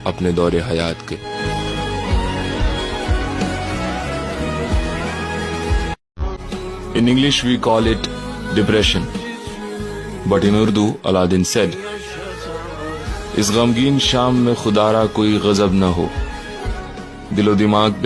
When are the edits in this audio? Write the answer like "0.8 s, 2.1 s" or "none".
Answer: 6.0 s